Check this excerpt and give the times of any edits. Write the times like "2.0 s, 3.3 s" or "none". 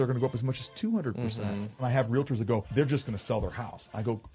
1.8 s, 2.7 s